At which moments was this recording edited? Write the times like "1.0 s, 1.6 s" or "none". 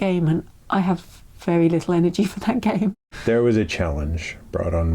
3.1 s